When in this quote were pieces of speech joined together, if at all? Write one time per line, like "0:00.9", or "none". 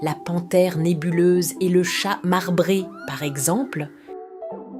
0:03.9